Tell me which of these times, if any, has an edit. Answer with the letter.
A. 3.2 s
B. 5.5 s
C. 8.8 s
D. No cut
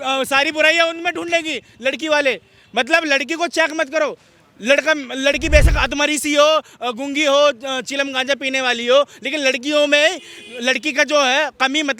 D